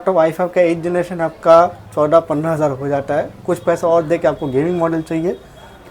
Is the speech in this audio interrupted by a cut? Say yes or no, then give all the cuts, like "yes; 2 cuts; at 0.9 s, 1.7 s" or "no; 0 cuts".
no; 0 cuts